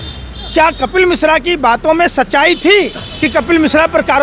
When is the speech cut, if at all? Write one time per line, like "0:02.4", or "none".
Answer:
0:03.0